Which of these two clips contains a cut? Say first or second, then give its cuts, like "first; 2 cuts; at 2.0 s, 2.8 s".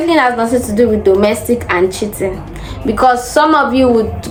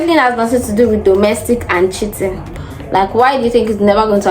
second; 1 cut; at 2.7 s